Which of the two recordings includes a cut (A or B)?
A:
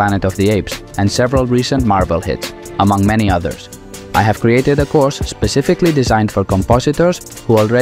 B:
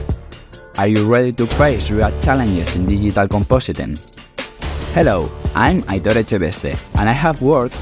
A